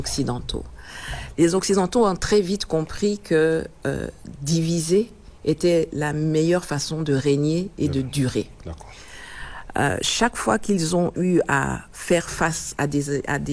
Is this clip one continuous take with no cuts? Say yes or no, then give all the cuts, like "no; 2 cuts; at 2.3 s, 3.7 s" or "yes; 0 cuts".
yes; 0 cuts